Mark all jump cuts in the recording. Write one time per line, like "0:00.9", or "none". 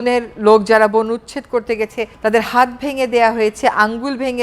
0:02.1